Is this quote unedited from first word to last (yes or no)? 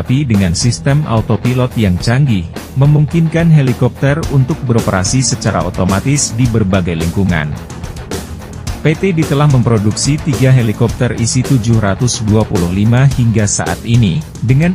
yes